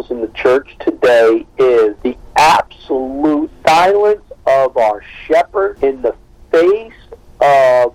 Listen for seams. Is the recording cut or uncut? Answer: uncut